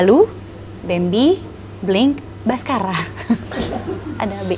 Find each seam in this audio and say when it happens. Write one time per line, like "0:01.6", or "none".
none